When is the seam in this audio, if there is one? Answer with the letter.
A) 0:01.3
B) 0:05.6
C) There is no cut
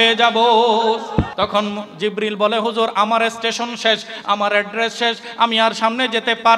A